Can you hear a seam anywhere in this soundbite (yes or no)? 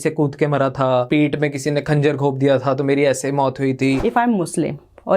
yes